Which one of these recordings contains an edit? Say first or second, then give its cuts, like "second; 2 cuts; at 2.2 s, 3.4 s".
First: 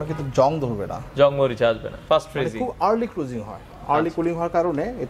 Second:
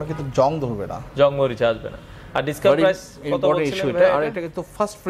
first; 1 cut; at 1.9 s